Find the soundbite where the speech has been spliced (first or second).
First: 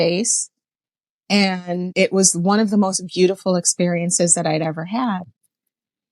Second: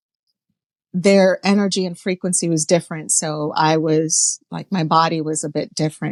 first